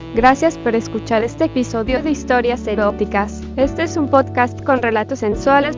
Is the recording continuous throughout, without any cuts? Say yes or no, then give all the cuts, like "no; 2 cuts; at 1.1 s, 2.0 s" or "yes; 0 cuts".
yes; 0 cuts